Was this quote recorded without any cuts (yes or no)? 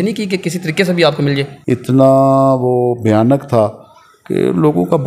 no